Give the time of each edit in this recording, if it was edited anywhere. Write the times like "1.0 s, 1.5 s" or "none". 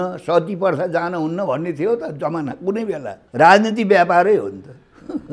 3.2 s

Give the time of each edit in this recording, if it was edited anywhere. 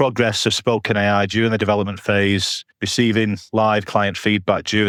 none

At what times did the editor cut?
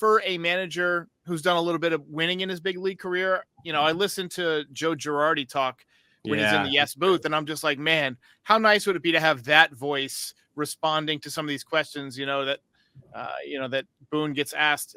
none

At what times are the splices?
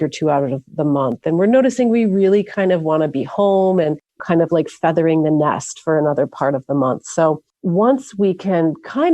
4.2 s, 7.5 s

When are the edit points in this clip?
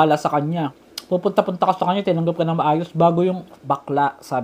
3.5 s

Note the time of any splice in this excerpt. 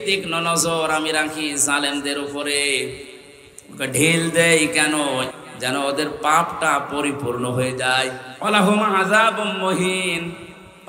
5.3 s, 8.3 s

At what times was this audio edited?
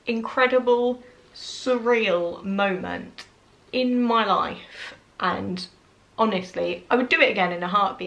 none

